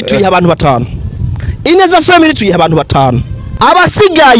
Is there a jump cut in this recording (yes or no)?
yes